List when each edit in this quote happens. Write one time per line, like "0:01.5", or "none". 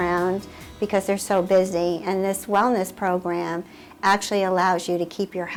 none